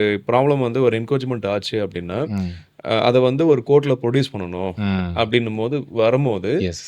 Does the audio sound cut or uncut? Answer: uncut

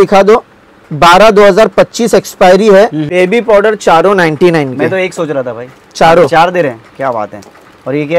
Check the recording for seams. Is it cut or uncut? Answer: cut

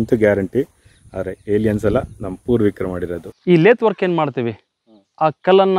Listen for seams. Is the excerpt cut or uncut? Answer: cut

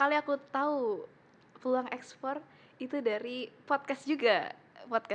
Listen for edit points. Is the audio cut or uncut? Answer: uncut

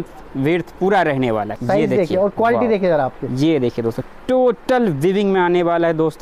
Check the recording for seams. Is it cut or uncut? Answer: cut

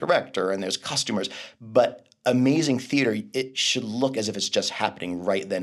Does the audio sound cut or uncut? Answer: uncut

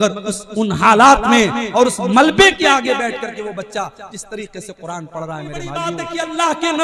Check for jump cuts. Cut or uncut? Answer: cut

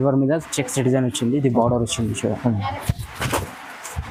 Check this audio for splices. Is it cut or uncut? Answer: uncut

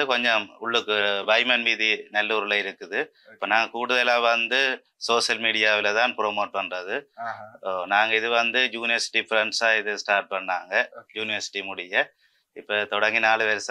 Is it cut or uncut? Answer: uncut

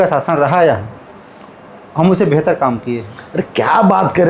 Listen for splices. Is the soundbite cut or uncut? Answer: uncut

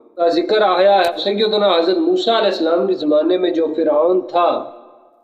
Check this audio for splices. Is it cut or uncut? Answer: cut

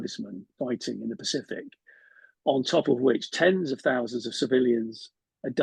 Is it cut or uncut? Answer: uncut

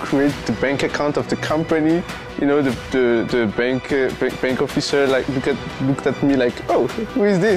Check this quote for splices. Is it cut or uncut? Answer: uncut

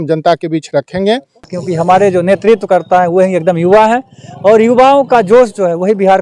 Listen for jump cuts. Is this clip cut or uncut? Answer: cut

